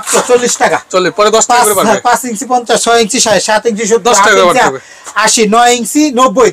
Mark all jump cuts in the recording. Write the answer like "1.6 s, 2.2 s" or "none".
none